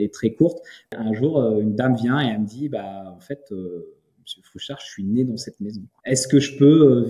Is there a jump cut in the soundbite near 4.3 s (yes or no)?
no